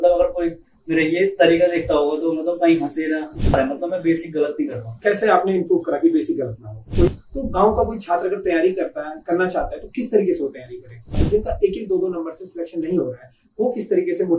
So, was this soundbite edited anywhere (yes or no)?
yes